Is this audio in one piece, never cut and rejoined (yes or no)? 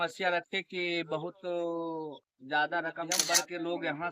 no